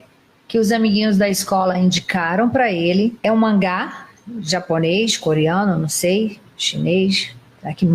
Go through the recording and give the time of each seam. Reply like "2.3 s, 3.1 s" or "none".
3.2 s